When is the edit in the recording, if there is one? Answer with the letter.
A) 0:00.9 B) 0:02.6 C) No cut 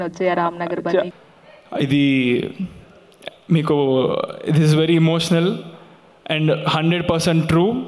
A